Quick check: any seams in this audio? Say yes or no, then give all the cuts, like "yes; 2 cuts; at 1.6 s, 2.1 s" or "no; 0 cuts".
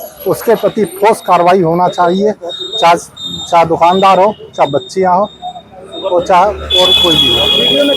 no; 0 cuts